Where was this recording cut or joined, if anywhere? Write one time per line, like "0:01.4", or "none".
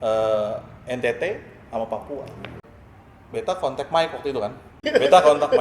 0:02.8
0:04.7